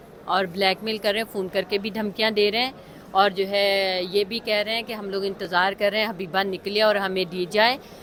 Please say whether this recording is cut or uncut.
uncut